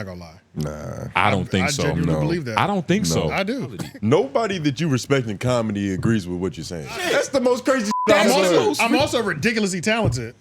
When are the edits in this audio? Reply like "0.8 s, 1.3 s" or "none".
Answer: 3.8 s, 7.0 s